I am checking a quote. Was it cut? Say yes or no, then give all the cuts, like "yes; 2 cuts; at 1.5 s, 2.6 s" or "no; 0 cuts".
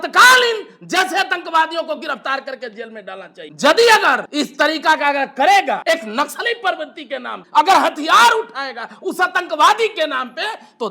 yes; 4 cuts; at 3.4 s, 4.2 s, 5.8 s, 7.4 s